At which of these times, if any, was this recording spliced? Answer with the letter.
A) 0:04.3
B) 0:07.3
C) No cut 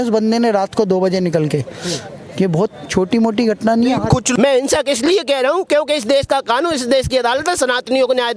A